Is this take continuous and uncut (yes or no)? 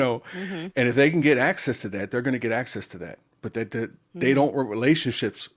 yes